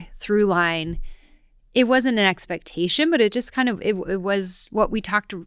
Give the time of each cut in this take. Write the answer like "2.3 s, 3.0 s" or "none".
none